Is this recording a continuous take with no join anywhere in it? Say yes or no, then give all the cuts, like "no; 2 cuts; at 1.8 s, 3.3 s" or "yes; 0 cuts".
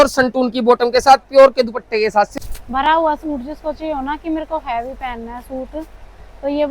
no; 1 cut; at 2.3 s